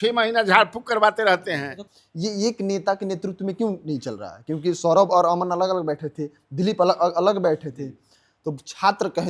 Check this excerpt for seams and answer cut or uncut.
cut